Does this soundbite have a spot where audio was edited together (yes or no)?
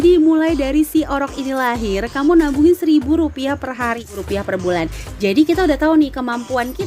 yes